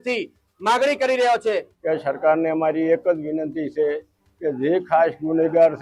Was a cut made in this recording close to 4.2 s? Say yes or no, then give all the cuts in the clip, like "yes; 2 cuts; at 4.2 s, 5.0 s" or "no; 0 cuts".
no; 1 cut; at 1.7 s